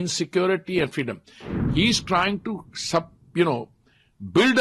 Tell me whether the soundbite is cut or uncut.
cut